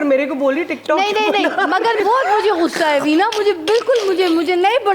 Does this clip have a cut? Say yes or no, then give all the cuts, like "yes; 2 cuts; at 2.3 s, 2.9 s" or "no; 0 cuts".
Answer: yes; 1 cut; at 2.0 s